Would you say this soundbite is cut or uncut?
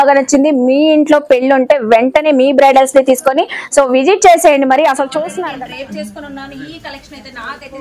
cut